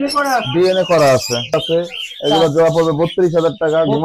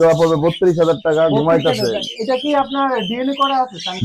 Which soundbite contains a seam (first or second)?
first